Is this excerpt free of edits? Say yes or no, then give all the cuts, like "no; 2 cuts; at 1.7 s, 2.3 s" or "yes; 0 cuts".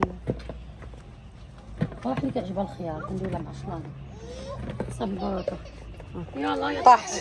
yes; 0 cuts